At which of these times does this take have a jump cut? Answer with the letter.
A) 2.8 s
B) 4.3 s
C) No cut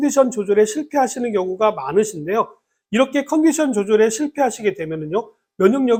C